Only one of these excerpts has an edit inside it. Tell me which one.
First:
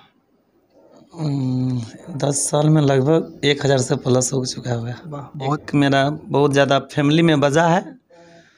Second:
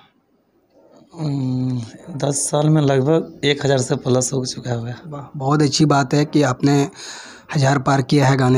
first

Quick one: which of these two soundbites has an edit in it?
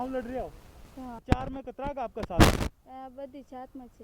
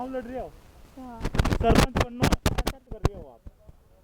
first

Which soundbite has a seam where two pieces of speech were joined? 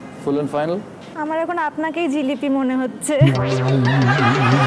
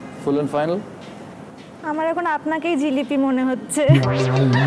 first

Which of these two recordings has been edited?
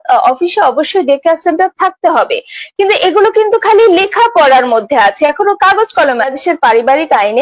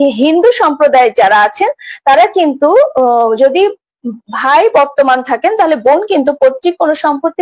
first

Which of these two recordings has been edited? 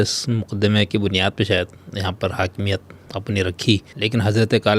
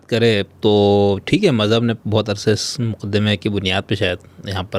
first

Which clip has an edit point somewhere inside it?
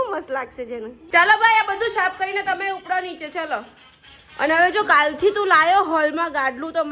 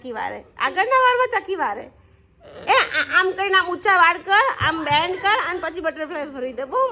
first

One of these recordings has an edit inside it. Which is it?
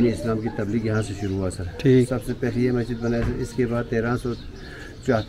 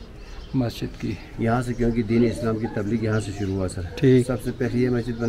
second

